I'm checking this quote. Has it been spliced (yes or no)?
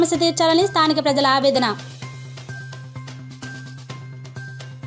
yes